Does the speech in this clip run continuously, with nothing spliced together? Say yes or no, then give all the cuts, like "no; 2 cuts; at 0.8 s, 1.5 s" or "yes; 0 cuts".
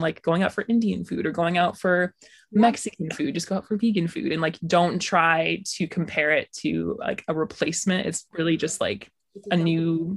no; 1 cut; at 8.2 s